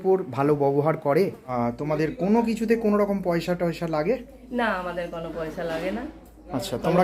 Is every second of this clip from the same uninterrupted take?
no; 1 cut; at 1.5 s

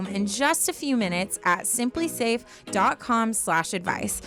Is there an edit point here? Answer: no; 0 cuts

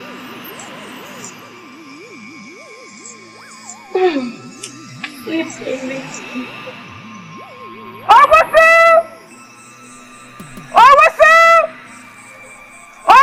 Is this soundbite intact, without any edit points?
yes; 0 cuts

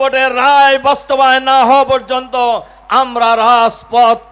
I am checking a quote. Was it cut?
no; 0 cuts

